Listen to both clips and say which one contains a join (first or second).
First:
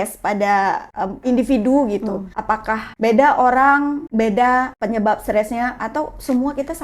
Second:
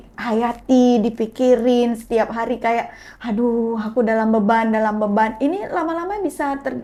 first